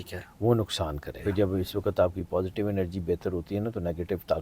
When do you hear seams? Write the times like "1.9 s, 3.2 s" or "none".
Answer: 1.2 s